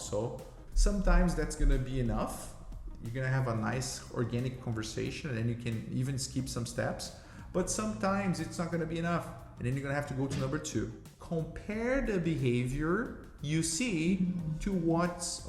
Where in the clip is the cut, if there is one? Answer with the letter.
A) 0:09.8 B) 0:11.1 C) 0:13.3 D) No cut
B